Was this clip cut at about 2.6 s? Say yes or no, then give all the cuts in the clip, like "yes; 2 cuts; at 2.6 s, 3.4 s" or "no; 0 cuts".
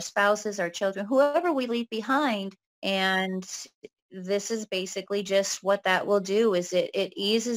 yes; 1 cut; at 2.6 s